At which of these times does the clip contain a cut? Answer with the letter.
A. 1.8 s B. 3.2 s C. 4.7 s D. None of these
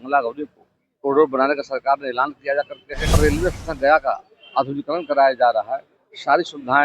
B